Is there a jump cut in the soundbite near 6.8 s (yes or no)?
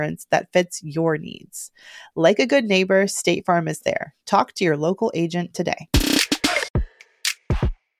yes